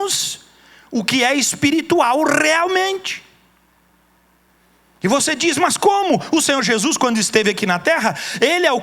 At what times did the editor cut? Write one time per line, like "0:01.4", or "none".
0:04.5